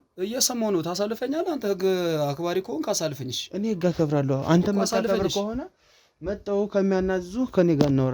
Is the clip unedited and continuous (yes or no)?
yes